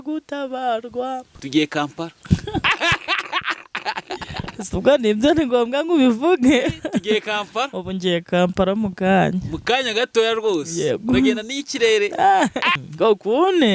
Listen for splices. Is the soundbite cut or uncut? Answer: cut